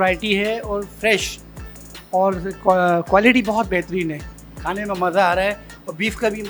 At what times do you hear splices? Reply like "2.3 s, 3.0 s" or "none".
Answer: 1.6 s